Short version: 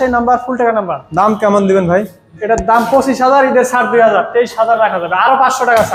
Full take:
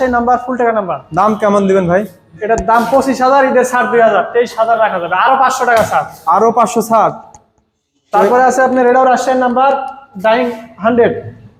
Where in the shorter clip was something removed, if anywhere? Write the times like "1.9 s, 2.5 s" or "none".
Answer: none